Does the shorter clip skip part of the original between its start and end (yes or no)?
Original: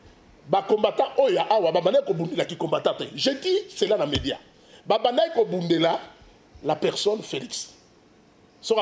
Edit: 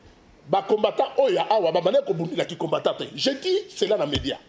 no